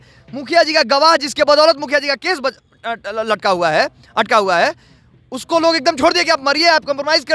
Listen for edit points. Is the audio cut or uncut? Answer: uncut